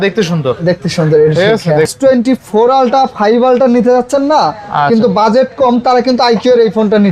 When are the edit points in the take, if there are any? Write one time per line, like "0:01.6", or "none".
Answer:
0:01.9